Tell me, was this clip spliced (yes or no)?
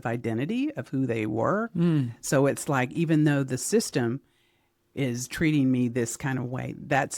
no